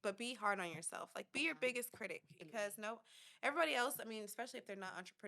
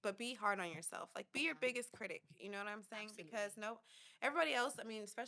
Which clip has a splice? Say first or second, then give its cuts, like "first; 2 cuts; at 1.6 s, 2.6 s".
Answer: first; 1 cut; at 2.3 s